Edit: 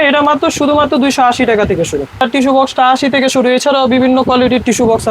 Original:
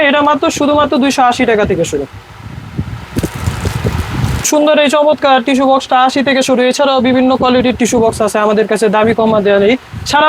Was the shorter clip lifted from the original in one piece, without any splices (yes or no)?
no